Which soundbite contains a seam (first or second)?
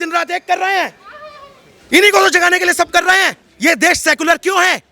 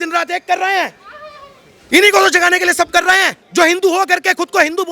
first